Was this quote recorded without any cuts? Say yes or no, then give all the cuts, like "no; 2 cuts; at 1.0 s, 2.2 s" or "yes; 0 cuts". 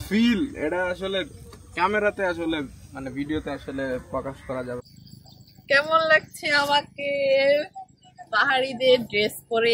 no; 1 cut; at 4.8 s